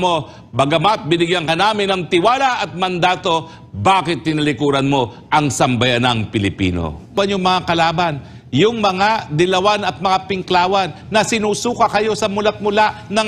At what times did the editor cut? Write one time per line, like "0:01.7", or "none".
0:07.1